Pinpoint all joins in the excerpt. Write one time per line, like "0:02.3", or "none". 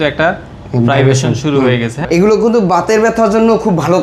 0:01.9